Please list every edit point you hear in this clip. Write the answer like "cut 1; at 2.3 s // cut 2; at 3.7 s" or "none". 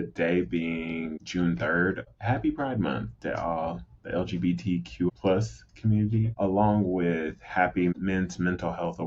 cut 1; at 7.9 s

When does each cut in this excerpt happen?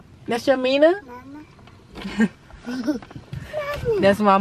none

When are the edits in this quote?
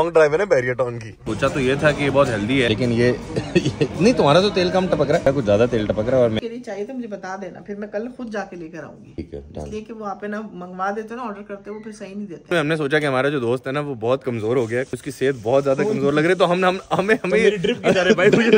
cut 1; at 1.3 s // cut 2; at 2.7 s // cut 3; at 5.2 s // cut 4; at 6.4 s // cut 5; at 9.2 s // cut 6; at 12.5 s // cut 7; at 15.0 s

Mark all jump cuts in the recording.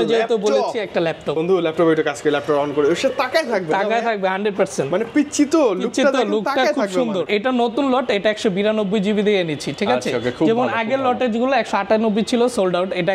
cut 1; at 1.4 s // cut 2; at 7.3 s

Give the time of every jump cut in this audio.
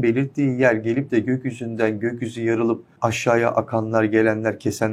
cut 1; at 2.9 s

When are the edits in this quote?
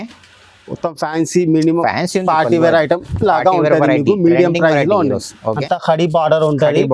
cut 1; at 5.6 s

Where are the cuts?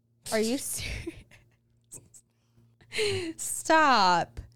cut 1; at 2.6 s

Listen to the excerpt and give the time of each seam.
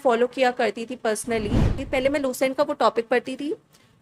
cut 1; at 1.8 s

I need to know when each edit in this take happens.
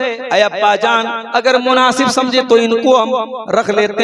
none

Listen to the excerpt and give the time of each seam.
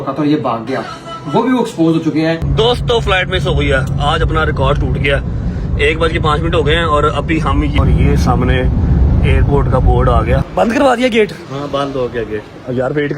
cut 1; at 2.4 s // cut 2; at 7.8 s // cut 3; at 10.6 s

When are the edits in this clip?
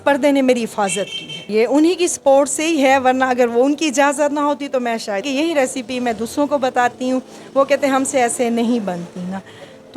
cut 1; at 1.4 s // cut 2; at 5.3 s

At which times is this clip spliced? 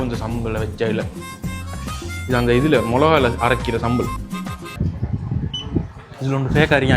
cut 1; at 4.7 s

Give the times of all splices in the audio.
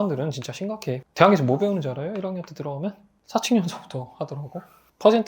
cut 1; at 1.1 s

